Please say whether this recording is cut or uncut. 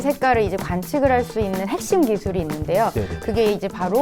uncut